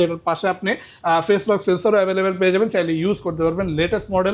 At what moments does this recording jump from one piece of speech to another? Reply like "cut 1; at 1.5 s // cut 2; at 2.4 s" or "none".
none